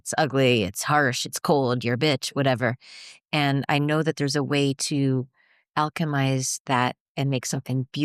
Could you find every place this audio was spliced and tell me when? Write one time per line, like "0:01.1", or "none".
none